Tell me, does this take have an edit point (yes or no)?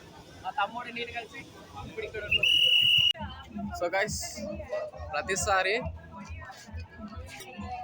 yes